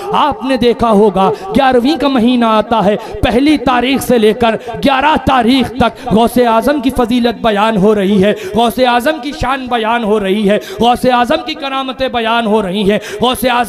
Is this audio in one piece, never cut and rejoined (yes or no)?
yes